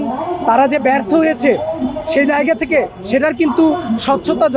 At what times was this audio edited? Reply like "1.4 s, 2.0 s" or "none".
none